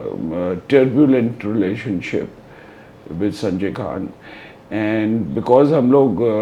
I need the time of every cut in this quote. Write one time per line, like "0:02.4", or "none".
none